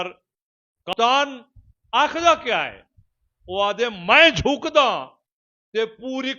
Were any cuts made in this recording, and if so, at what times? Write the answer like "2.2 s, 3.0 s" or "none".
0.9 s